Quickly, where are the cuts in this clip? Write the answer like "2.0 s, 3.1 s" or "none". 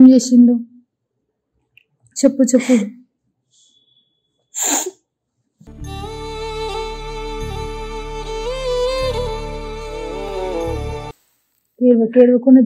none